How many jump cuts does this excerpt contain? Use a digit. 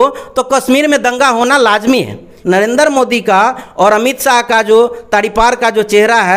1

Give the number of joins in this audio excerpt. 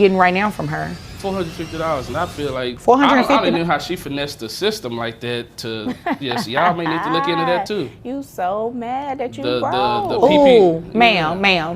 2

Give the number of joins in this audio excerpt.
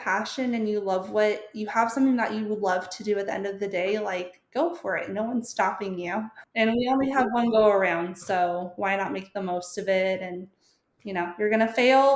1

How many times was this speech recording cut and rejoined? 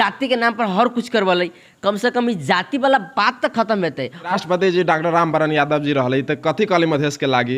1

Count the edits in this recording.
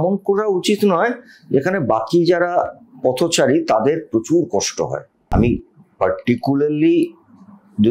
1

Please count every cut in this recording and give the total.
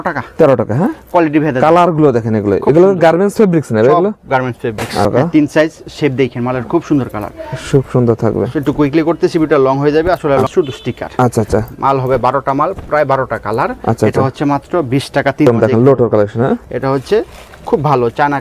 3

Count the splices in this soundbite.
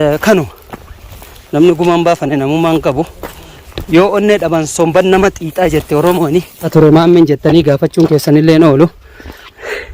1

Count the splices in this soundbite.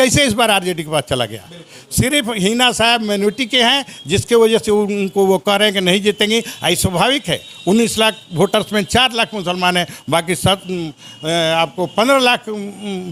0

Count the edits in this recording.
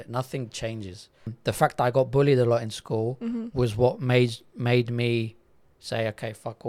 1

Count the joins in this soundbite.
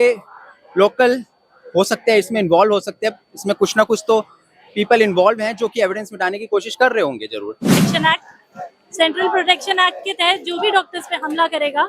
1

